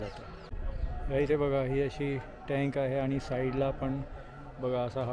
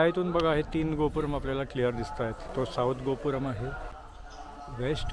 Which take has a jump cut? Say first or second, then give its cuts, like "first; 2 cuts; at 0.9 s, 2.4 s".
second; 1 cut; at 3.9 s